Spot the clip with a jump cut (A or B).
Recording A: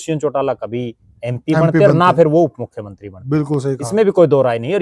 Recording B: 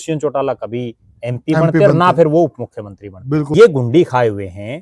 B